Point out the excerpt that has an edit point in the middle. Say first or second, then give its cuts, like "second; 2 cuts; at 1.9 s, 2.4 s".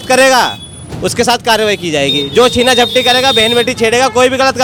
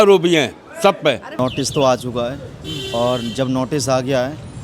second; 1 cut; at 1.4 s